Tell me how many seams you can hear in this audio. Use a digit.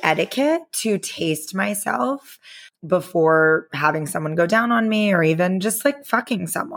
1